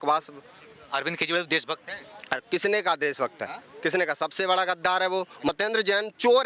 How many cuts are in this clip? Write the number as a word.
one